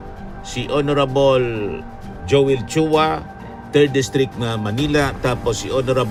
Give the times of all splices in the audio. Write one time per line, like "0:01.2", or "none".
none